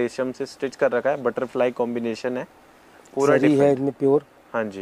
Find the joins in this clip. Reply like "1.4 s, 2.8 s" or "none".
none